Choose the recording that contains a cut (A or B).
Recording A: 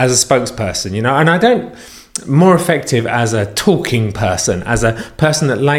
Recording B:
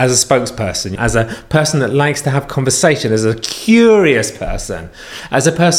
B